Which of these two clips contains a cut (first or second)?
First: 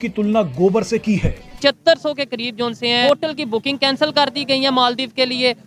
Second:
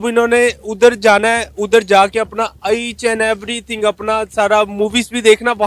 first